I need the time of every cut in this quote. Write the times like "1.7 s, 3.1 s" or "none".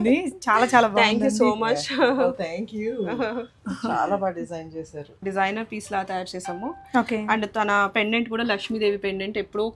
5.2 s